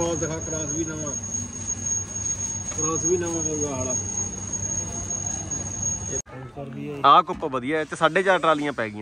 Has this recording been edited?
yes; 1 cut; at 6.2 s

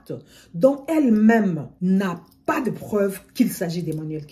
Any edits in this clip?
yes; 1 cut; at 1.7 s

